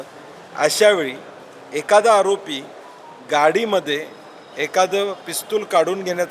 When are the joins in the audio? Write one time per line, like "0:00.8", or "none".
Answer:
none